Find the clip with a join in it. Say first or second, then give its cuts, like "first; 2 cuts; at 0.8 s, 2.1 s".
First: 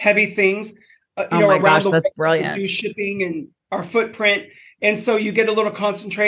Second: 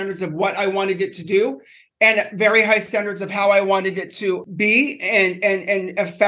second; 1 cut; at 4.4 s